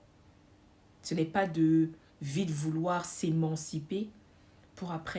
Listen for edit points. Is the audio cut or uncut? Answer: uncut